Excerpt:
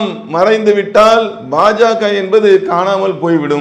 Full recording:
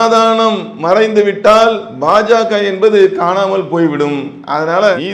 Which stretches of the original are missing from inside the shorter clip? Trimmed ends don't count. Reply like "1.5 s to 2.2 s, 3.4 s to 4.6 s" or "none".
none